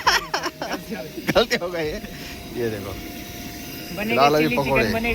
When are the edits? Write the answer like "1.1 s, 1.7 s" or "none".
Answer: none